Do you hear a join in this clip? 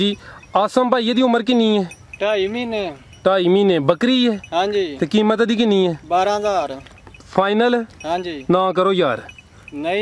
no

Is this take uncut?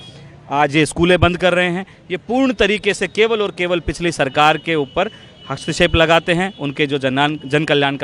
yes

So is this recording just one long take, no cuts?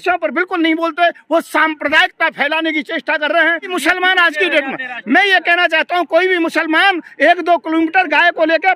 no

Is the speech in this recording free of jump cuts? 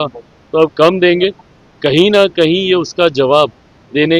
yes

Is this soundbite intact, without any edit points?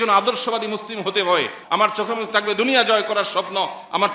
no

